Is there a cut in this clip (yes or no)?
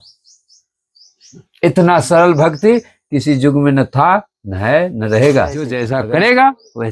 yes